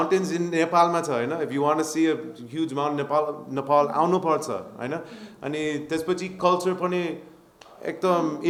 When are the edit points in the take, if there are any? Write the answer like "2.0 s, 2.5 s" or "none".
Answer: none